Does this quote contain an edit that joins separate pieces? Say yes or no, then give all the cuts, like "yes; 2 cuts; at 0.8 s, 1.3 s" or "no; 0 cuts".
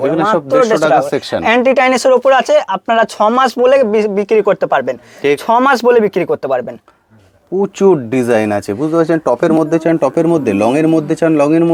no; 0 cuts